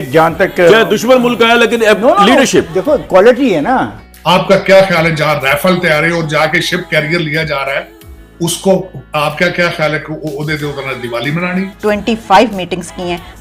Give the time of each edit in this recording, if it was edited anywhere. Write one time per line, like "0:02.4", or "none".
0:04.0
0:11.8